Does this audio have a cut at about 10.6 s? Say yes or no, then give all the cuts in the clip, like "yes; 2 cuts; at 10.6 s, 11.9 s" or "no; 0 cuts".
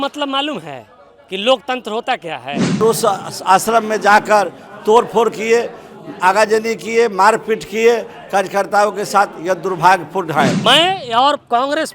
yes; 2 cuts; at 2.8 s, 10.6 s